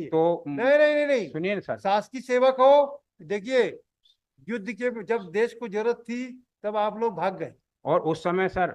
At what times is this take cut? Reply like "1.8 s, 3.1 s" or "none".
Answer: none